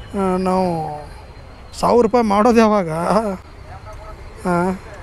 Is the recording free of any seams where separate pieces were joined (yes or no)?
yes